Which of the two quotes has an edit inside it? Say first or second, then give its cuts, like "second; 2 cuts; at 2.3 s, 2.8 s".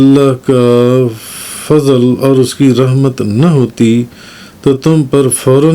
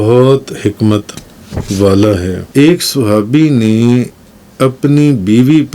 second; 1 cut; at 2.4 s